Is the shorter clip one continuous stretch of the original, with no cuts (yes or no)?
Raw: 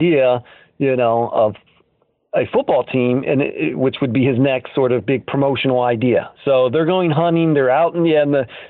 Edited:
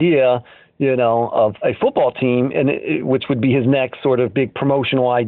no